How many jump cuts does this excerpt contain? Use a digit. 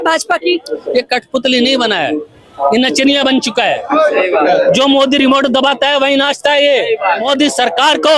1